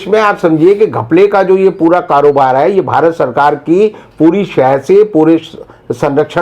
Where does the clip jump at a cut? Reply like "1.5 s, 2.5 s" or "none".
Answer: none